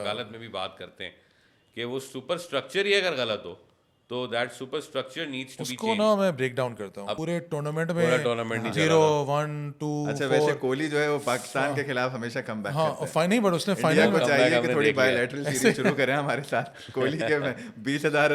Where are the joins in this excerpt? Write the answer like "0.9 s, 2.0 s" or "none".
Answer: 7.1 s